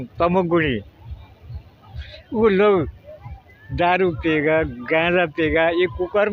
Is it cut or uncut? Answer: uncut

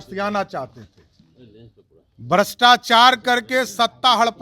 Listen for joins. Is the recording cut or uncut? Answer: uncut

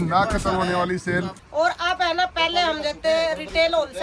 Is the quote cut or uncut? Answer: cut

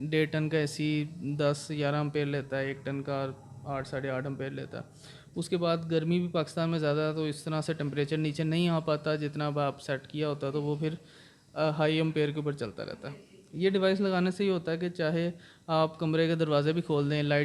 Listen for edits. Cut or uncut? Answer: uncut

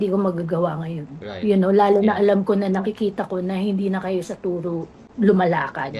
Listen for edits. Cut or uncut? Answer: cut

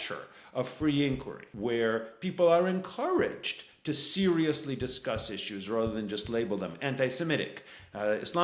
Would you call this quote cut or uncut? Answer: cut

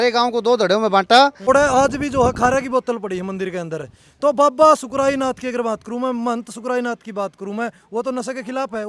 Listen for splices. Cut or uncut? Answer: cut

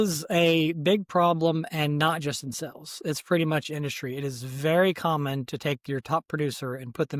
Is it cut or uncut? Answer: uncut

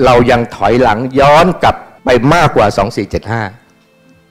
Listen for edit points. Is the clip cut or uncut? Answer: cut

